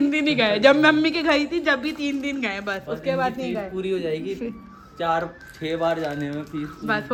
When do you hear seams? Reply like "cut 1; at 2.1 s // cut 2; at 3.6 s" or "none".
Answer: none